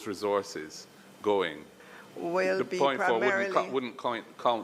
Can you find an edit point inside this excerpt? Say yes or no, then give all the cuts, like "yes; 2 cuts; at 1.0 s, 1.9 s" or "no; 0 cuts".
yes; 1 cut; at 1.9 s